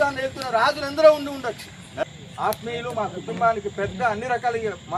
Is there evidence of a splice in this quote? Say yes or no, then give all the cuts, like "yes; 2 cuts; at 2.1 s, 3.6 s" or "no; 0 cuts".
yes; 1 cut; at 2.1 s